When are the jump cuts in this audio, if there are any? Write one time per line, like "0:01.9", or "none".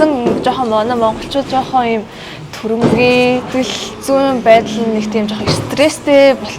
0:03.5